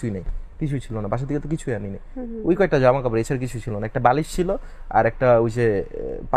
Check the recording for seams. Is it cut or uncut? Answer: uncut